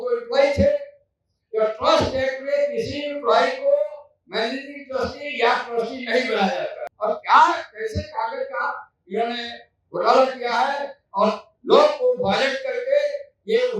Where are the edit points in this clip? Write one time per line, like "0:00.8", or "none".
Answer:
0:06.8

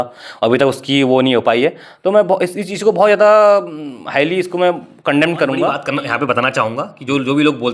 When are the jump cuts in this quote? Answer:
0:05.8

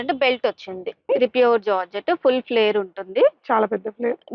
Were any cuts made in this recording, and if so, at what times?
0:01.1

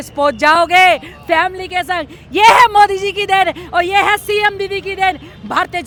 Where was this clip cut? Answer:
none

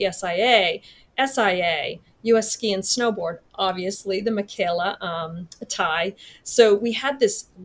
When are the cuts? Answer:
none

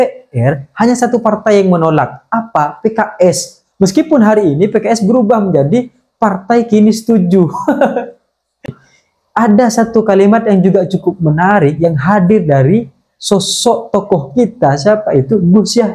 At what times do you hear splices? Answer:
0:08.7

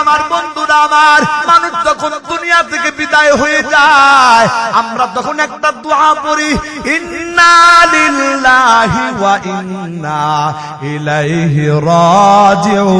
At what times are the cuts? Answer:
0:01.4

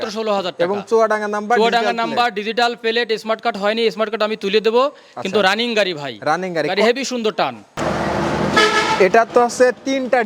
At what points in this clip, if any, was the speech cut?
0:07.8

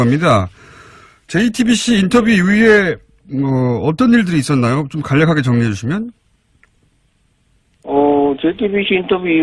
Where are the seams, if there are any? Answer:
none

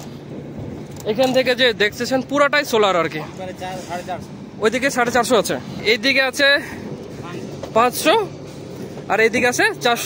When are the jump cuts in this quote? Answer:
0:05.8

